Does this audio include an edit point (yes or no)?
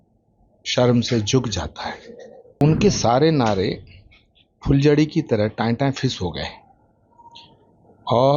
yes